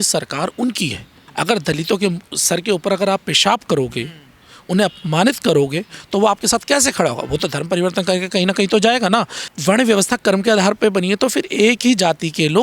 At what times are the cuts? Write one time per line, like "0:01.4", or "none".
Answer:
0:01.2
0:05.9
0:09.4